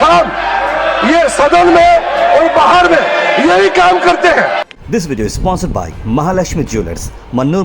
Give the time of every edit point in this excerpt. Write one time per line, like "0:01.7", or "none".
0:04.8